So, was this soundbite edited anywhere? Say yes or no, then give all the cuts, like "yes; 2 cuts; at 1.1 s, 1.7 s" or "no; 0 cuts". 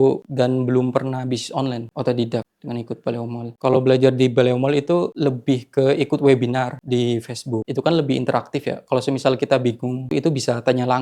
no; 0 cuts